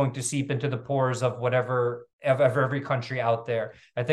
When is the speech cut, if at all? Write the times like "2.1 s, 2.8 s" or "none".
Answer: none